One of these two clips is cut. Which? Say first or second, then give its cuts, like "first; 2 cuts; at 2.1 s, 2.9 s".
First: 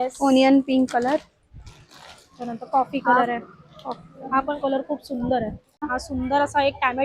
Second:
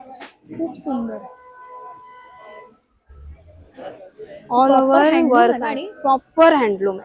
first; 1 cut; at 5.9 s